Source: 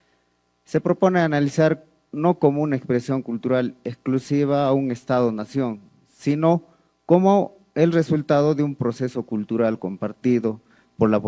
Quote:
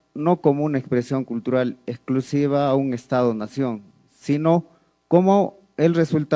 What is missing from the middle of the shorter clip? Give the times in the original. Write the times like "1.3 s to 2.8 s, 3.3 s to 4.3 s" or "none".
none